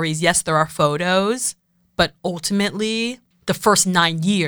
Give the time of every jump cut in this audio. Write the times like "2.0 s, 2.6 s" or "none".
3.3 s